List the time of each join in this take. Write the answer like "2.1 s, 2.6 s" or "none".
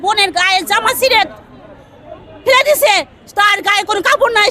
none